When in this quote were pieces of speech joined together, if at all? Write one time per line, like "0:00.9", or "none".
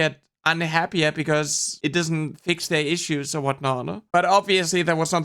0:01.6